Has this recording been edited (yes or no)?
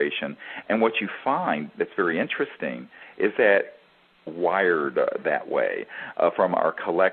no